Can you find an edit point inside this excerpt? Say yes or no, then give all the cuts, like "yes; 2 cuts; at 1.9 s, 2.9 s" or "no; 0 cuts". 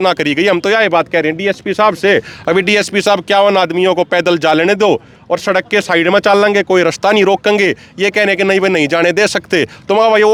no; 0 cuts